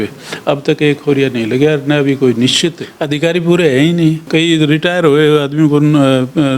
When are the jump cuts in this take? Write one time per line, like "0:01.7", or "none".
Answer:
0:02.9
0:04.3